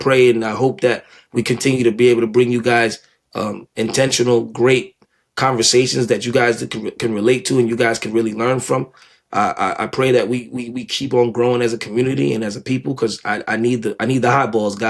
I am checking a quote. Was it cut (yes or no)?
no